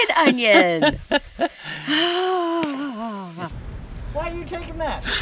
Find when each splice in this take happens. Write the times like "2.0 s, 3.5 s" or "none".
3.5 s